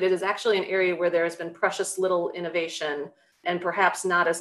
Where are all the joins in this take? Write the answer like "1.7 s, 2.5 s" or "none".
3.4 s